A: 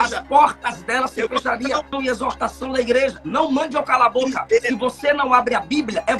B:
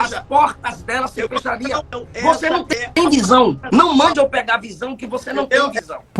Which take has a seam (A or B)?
A